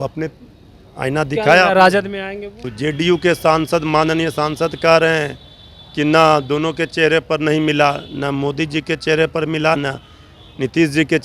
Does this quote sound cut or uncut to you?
cut